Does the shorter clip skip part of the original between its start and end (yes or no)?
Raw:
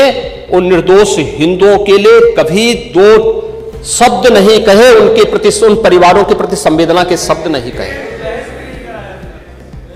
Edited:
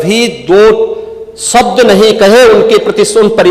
no